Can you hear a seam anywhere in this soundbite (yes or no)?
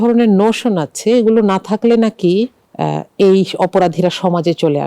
yes